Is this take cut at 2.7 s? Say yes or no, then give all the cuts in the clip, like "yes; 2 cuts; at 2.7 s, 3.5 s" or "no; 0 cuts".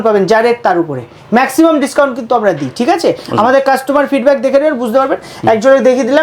no; 0 cuts